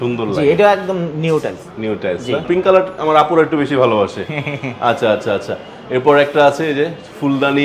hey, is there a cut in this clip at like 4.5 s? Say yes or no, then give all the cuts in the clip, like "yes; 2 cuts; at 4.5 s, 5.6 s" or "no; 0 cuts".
no; 1 cut; at 2.4 s